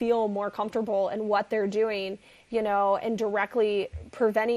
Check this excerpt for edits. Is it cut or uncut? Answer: uncut